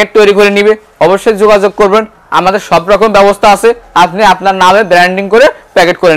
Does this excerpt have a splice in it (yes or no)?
no